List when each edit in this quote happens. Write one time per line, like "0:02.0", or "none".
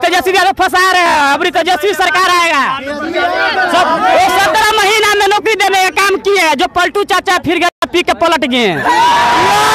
none